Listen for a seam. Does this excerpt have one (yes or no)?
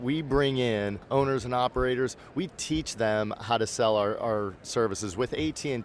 yes